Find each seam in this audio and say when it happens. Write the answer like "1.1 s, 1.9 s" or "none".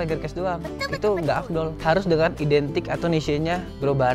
none